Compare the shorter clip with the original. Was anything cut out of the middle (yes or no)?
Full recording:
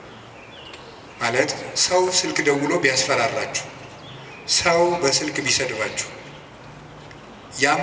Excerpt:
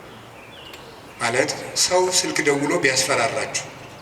no